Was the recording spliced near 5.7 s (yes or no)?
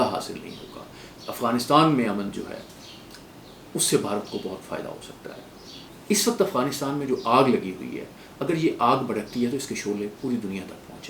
yes